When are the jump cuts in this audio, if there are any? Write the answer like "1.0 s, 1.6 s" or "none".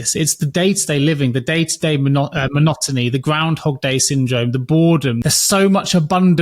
5.2 s